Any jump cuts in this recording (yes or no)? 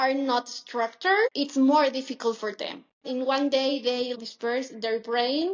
yes